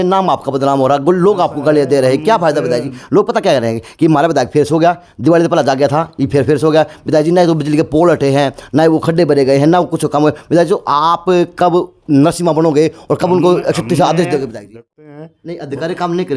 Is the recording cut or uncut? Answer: cut